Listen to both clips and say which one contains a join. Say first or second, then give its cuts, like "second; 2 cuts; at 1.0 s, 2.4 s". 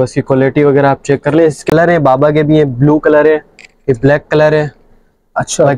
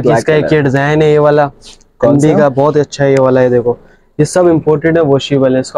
first; 1 cut; at 1.6 s